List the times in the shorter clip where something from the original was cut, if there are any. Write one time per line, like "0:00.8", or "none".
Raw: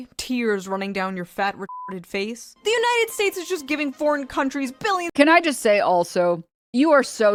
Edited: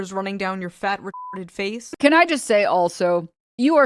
0:01.9